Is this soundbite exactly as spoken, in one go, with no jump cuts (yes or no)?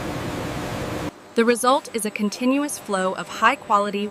no